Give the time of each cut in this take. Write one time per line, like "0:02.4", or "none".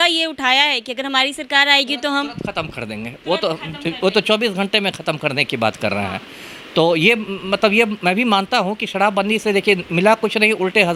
none